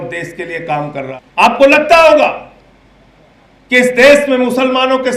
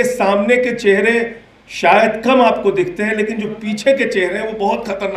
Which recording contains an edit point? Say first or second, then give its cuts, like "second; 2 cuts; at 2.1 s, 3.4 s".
first; 1 cut; at 1.1 s